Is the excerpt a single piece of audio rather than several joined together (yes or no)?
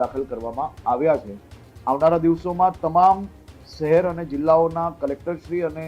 yes